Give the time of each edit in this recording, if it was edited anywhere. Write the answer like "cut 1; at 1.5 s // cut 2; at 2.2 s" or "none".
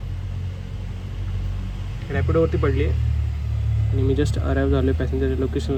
none